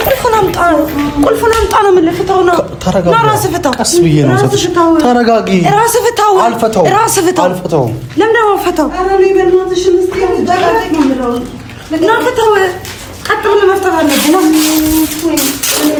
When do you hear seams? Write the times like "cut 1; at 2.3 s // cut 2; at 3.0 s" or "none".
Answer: none